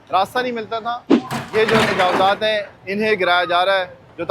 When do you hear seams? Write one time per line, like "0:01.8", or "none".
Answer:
0:01.0